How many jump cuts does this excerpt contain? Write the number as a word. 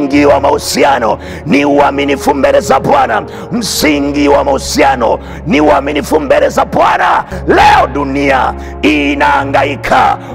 one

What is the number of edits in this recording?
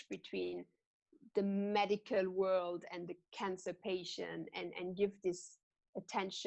zero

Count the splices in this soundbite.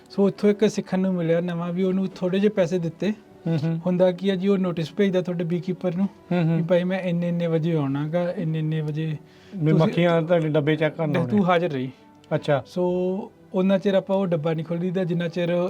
zero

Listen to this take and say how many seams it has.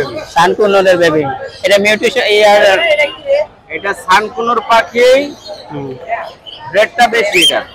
zero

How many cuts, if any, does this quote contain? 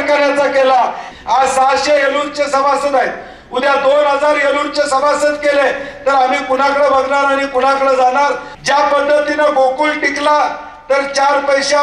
two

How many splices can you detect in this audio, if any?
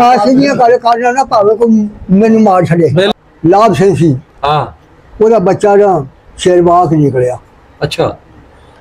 one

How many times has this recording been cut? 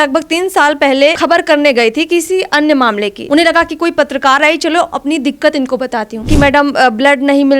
three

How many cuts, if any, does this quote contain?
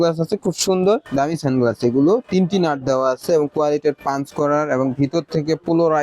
one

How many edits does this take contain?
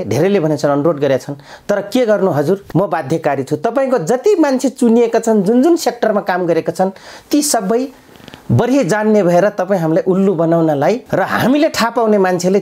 two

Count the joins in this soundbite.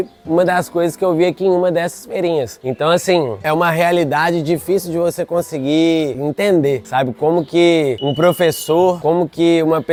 zero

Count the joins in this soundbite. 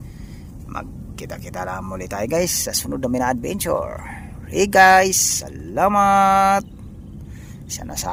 zero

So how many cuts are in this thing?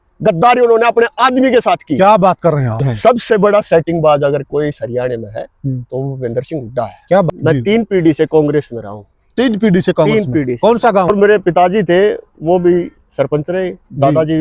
three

